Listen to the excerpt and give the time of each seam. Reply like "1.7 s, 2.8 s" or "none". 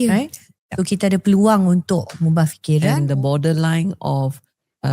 2.9 s